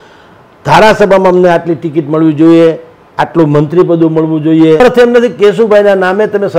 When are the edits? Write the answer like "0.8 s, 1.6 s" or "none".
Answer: 4.8 s